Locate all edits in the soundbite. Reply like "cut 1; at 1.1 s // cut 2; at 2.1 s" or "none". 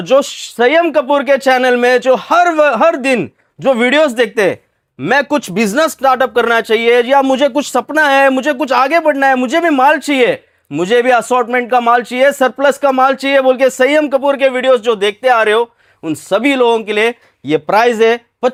none